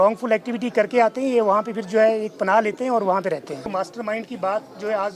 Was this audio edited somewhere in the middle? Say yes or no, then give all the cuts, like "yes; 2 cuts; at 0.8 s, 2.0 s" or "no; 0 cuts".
yes; 1 cut; at 3.7 s